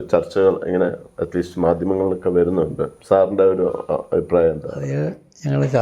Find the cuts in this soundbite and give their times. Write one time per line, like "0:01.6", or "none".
0:02.9
0:04.8